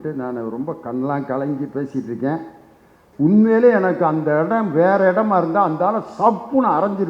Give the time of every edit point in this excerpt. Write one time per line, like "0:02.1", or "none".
0:03.0